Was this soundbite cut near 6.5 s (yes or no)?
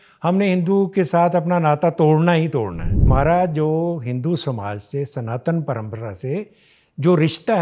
no